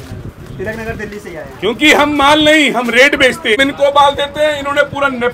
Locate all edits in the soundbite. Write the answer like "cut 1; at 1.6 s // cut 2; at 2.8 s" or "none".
cut 1; at 3.6 s